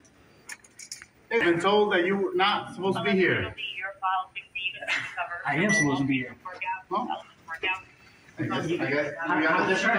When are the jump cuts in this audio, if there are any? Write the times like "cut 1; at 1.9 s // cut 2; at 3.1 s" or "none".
cut 1; at 1.4 s